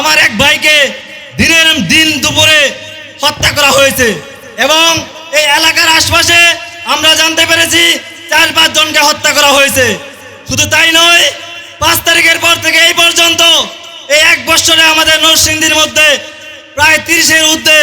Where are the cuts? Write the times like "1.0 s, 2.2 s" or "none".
none